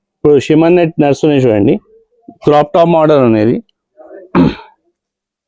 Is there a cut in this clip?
no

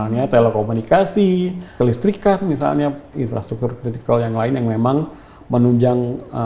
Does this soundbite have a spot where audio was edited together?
yes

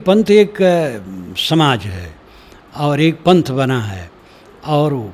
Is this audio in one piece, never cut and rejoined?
yes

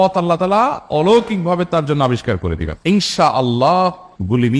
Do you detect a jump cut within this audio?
yes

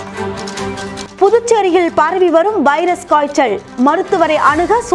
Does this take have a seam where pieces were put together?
no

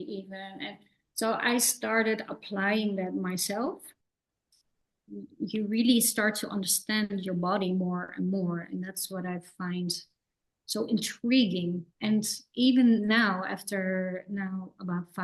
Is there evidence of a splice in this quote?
yes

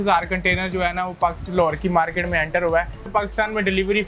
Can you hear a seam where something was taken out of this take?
yes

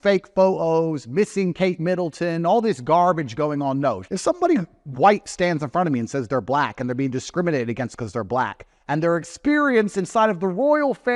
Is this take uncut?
no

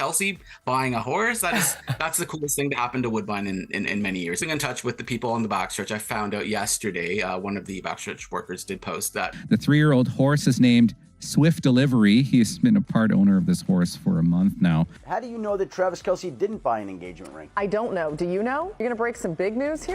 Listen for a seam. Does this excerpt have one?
yes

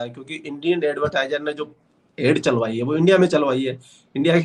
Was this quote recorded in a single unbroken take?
yes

